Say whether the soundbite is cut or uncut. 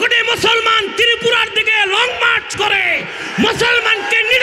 uncut